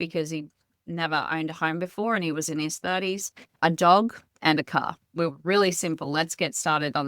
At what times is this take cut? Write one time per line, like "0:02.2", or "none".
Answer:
0:05.1